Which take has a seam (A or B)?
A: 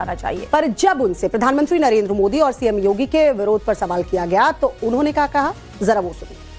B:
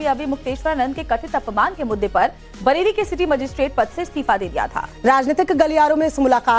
A